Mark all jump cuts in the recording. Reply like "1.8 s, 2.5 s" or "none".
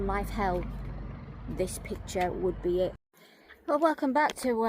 3.0 s